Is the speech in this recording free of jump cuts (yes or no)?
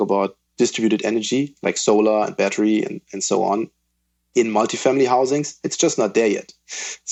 yes